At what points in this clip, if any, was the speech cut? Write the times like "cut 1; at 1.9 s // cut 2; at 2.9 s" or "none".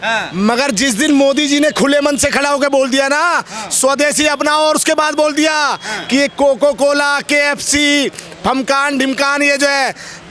none